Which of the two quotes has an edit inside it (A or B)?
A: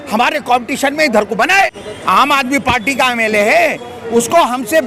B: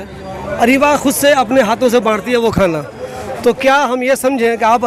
A